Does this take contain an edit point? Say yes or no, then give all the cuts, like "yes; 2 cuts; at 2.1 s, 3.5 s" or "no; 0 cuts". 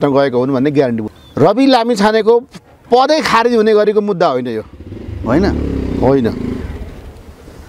yes; 1 cut; at 1.1 s